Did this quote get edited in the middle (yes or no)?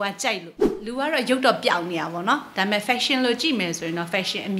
yes